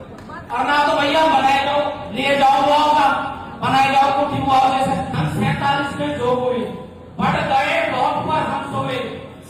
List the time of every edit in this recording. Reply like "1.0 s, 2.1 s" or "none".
none